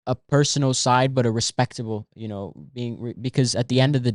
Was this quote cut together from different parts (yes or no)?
no